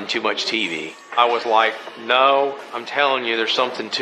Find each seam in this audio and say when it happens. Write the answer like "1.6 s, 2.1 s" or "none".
1.0 s